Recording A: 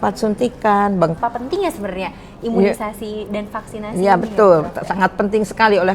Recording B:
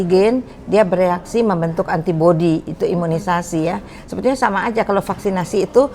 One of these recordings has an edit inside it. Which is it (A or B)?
A